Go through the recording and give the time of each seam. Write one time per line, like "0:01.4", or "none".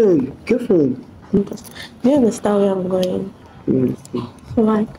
0:01.4